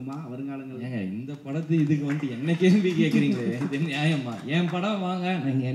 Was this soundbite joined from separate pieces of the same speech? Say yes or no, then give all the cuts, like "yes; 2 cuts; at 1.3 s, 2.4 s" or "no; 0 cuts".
no; 0 cuts